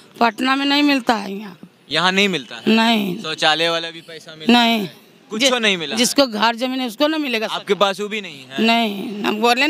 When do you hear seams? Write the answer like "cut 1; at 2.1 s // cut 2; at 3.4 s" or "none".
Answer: none